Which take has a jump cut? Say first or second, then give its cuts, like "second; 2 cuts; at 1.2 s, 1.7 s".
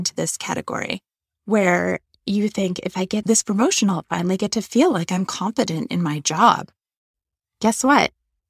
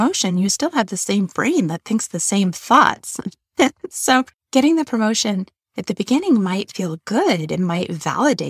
second; 1 cut; at 4.4 s